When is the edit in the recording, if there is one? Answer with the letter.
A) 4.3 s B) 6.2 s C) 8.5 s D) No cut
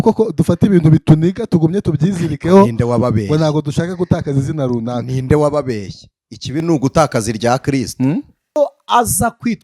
C